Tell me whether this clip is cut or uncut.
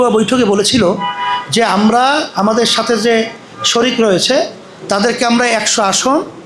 uncut